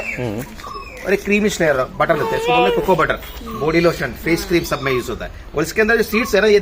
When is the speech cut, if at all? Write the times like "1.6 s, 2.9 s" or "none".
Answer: none